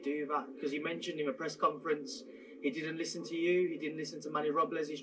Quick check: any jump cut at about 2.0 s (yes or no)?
no